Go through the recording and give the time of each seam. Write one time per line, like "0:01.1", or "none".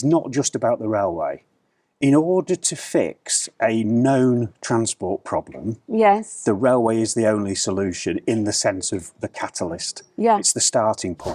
none